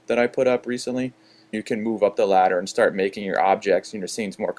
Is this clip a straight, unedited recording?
yes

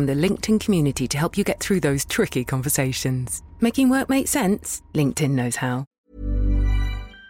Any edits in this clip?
yes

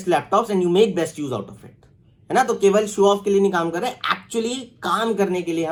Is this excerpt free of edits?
yes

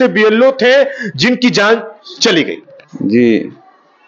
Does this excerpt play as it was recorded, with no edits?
yes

